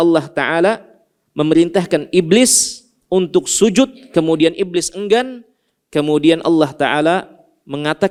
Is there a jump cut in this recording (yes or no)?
no